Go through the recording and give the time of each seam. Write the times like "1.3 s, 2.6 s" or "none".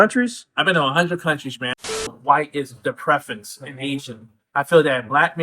2.0 s